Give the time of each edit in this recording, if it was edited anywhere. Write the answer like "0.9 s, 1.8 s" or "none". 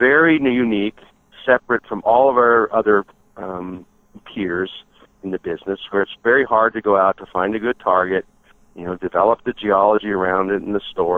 none

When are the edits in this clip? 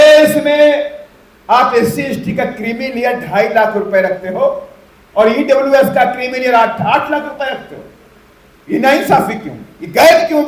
none

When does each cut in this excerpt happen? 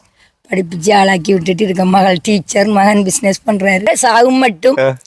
3.9 s

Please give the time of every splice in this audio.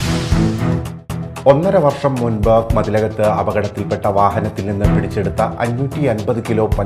0.9 s

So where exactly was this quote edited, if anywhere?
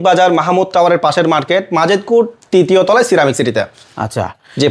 none

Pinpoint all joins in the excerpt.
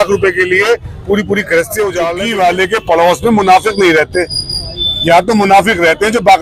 2.0 s

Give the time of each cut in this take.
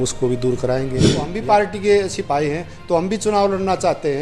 1.3 s

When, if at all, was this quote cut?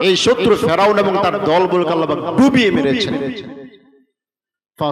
none

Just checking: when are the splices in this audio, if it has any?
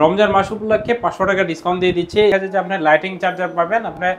2.3 s

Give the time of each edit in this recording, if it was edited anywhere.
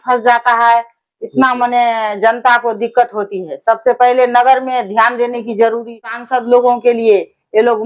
6.2 s

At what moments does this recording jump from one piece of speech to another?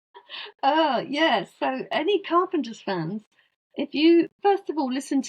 4.3 s

